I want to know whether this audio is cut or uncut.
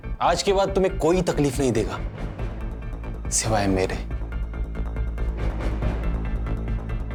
uncut